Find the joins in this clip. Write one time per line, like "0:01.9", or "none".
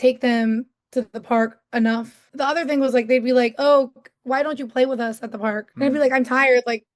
0:02.3
0:05.7